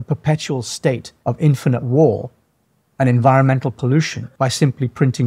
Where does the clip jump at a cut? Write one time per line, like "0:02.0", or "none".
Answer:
0:01.1
0:04.2